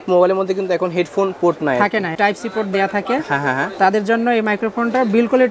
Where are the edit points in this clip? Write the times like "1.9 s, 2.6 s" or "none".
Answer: 2.1 s